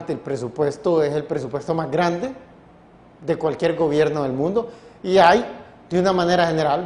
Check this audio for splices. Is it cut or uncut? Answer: uncut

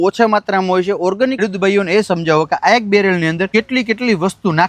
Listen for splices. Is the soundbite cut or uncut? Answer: cut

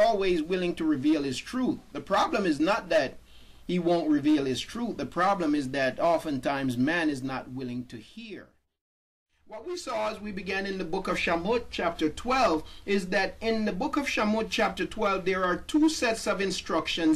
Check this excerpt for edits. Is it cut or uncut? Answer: cut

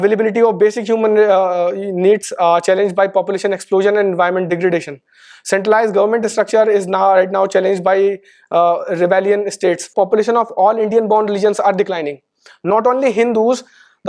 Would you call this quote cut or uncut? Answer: cut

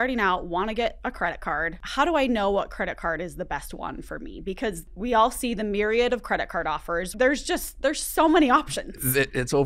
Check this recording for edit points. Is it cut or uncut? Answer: cut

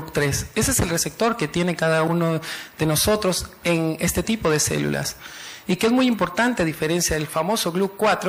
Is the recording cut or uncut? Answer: cut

